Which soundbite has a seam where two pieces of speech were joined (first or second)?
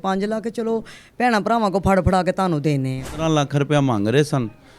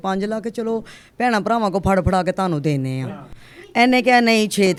first